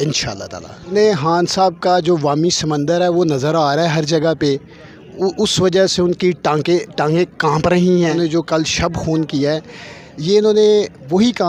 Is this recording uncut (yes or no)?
no